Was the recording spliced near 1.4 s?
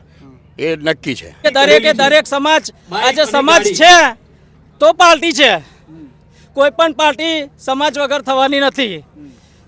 yes; 1 cut; at 1.4 s

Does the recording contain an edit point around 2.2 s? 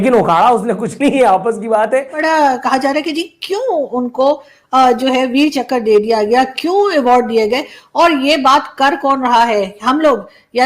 yes; 1 cut; at 2.2 s

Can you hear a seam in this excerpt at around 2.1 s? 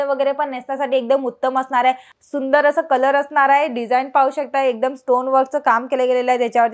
yes; 1 cut; at 2.1 s

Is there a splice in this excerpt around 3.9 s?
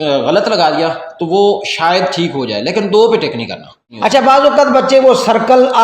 yes; 1 cut; at 3.9 s

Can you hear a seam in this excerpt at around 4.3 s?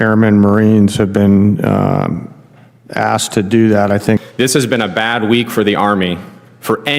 yes; 1 cut; at 4.3 s

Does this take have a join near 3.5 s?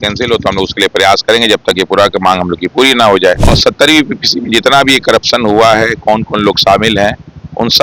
yes; 1 cut; at 3.5 s

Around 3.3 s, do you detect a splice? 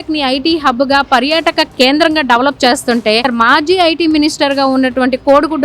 yes; 1 cut; at 3.3 s

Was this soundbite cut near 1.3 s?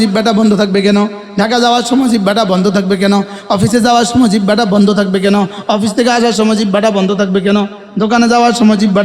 no; 0 cuts

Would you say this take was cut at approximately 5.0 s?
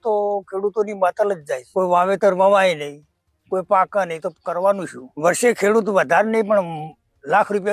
yes; 2 cuts; at 1.6 s, 5.0 s

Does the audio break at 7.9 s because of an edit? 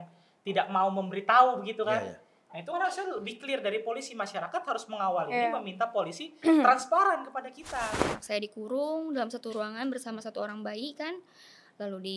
yes; 1 cut; at 7.9 s

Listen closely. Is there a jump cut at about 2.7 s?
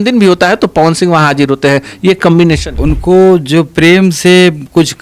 yes; 1 cut; at 2.7 s

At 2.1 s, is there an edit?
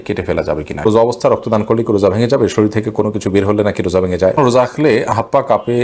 no; 2 cuts; at 0.8 s, 4.4 s

